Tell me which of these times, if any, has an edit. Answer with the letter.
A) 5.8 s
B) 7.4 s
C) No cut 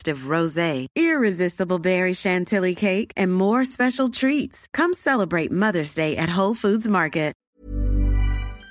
B